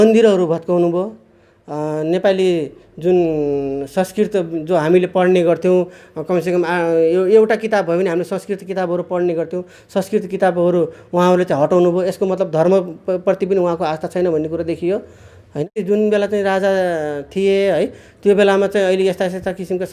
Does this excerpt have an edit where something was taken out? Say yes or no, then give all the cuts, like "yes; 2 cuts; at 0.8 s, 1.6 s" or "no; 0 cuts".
yes; 1 cut; at 15.7 s